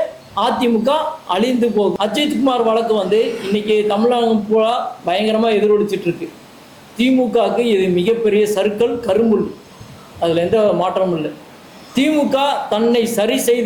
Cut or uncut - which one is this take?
cut